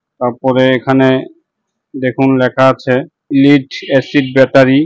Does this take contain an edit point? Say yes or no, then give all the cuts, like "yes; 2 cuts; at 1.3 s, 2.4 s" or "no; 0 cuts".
yes; 1 cut; at 3.2 s